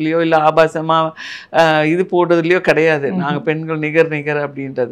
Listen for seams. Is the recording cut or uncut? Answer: uncut